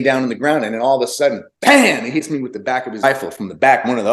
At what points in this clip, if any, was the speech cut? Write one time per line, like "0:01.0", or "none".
0:03.0